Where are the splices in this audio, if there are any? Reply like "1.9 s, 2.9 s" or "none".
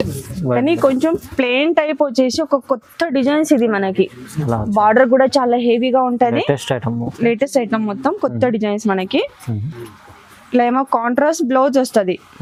none